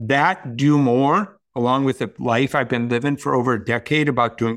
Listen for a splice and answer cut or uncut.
cut